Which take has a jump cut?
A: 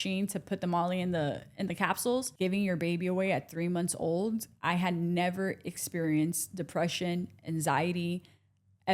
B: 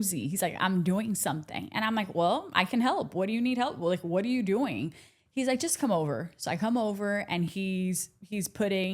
A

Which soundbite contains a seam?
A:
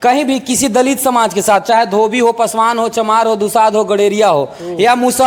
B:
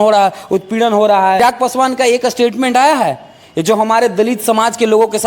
B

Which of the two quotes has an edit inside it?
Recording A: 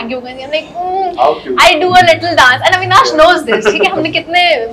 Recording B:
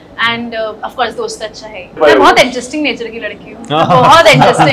B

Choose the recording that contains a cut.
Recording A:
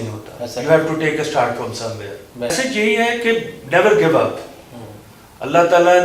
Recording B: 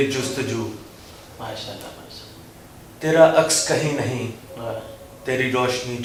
A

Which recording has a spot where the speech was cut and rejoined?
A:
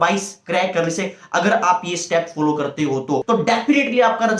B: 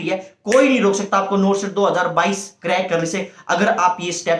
A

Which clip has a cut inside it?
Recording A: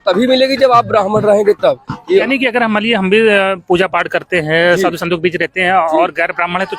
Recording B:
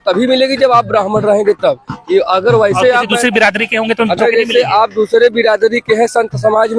A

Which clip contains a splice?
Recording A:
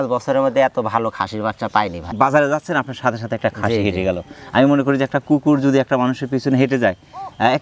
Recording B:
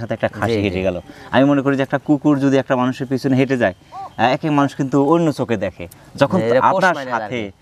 A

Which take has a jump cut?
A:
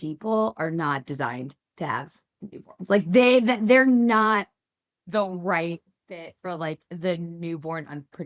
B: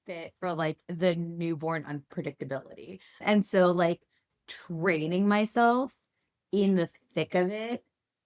B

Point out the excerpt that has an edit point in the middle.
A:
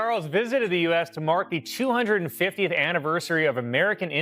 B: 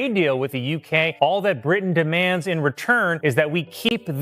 B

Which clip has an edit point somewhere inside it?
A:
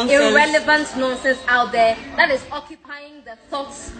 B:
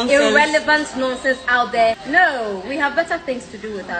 B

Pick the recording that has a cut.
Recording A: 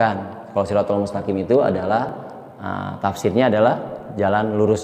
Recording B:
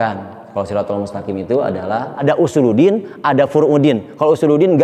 B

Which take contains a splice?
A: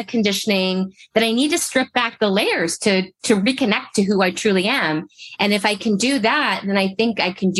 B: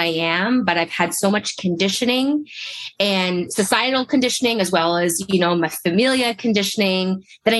B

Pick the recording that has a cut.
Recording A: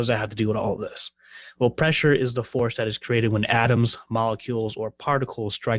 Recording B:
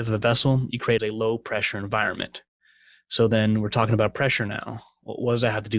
B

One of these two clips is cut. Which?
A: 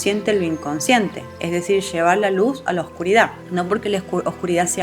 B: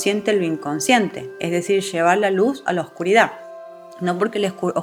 A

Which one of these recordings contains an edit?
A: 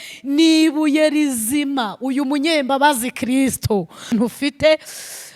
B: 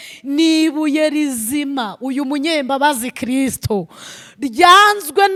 A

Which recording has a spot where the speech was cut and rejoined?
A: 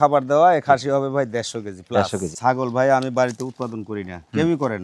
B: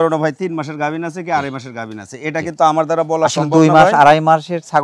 A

